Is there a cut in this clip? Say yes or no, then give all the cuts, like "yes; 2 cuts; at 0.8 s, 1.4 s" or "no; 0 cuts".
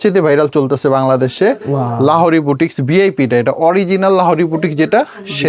no; 0 cuts